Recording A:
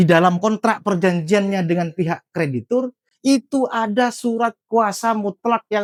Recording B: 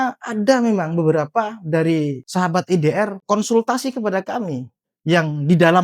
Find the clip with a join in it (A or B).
B